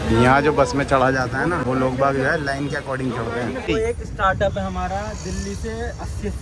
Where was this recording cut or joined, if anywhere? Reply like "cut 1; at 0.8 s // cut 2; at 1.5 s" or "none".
cut 1; at 1.6 s // cut 2; at 3.6 s